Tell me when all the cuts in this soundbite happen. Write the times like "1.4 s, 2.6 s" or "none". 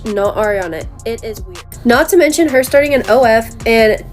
1.5 s